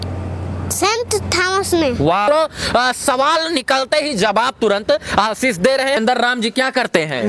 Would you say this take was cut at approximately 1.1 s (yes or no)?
no